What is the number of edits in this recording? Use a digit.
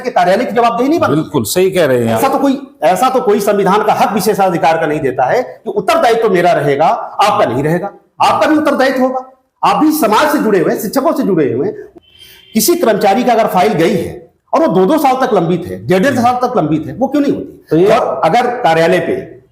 3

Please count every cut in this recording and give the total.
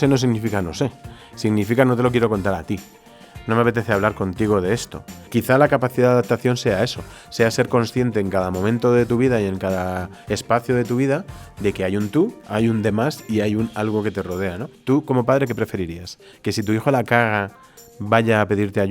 3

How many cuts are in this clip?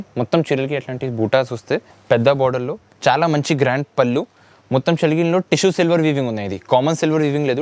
1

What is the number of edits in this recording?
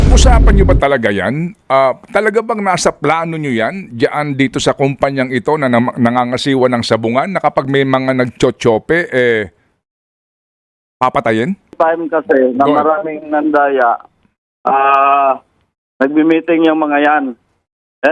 1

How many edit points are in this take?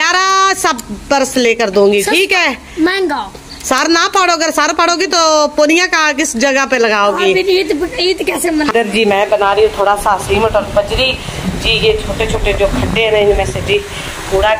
1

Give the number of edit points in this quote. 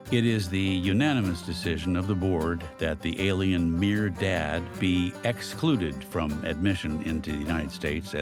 0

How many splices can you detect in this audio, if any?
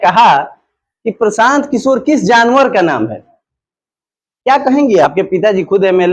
1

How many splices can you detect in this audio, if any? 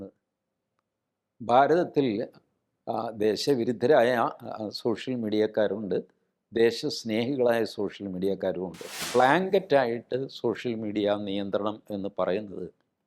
1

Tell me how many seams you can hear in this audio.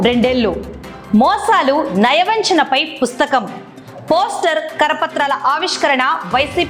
0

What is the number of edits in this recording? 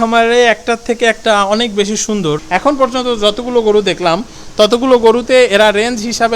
1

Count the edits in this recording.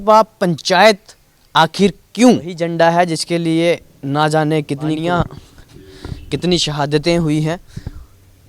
2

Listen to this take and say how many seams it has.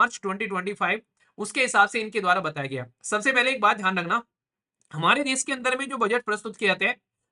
0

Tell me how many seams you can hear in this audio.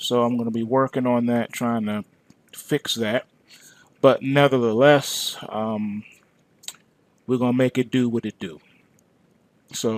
0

